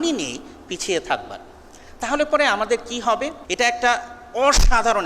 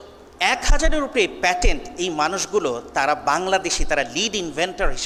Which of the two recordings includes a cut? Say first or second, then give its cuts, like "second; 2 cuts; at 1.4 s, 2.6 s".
first; 1 cut; at 3.4 s